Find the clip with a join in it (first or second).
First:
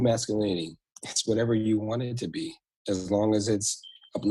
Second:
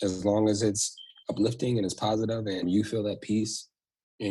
second